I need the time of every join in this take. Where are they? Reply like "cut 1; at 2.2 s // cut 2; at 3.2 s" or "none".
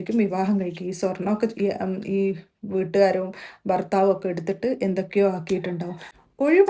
none